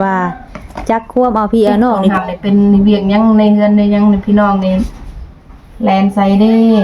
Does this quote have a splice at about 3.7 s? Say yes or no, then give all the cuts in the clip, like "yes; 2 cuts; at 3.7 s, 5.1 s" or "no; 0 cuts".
no; 1 cut; at 2.1 s